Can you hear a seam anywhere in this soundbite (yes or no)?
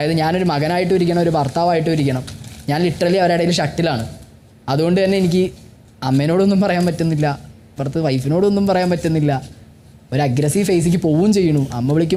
no